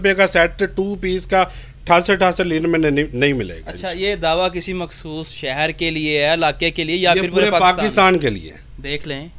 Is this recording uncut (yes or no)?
yes